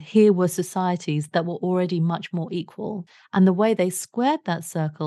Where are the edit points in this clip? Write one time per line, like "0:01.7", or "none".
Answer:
0:03.0